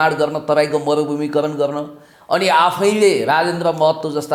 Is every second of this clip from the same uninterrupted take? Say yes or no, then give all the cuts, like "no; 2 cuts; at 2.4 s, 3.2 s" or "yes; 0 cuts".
yes; 0 cuts